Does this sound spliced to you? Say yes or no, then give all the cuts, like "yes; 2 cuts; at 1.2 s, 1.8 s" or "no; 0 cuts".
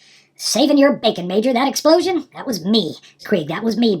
yes; 1 cut; at 3.1 s